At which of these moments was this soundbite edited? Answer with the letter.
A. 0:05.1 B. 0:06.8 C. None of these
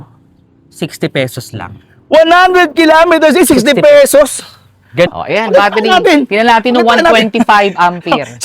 A